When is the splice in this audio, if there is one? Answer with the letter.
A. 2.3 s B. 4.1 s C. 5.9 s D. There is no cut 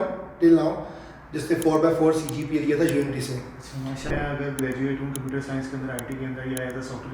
B